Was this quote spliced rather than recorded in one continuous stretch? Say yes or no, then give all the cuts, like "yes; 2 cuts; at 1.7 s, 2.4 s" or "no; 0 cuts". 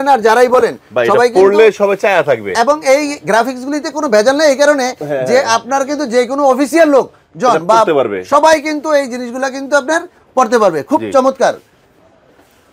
no; 0 cuts